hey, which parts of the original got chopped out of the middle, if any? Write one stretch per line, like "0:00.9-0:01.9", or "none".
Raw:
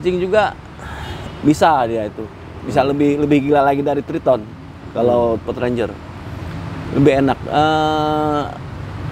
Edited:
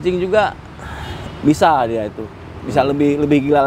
none